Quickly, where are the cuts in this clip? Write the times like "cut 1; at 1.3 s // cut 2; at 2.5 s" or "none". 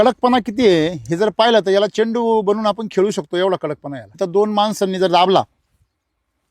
cut 1; at 4.2 s